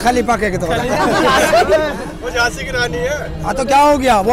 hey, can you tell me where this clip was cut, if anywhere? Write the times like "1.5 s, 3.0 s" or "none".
2.1 s